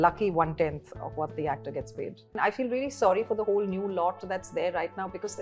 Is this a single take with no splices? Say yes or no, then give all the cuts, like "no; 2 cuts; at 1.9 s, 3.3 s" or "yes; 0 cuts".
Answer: no; 1 cut; at 2.3 s